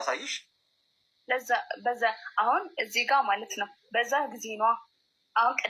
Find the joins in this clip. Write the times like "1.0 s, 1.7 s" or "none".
none